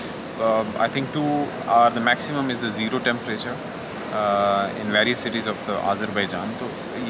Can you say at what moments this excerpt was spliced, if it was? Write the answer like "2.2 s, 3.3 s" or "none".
none